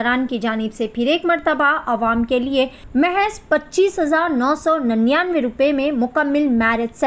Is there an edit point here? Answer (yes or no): yes